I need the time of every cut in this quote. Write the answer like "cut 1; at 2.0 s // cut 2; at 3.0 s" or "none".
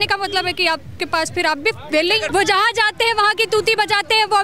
cut 1; at 2.2 s